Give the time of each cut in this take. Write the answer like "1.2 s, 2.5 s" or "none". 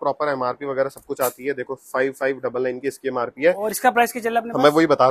none